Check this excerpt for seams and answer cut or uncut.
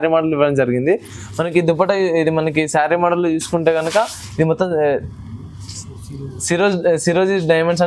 uncut